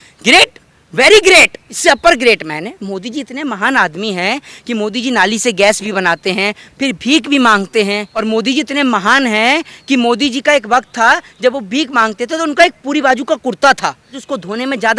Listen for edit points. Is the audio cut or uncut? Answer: cut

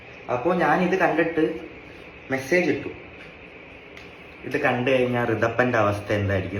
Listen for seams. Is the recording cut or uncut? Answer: uncut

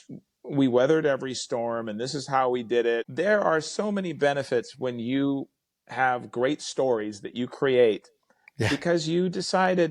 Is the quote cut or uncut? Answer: cut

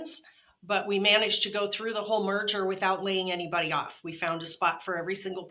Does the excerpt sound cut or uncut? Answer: uncut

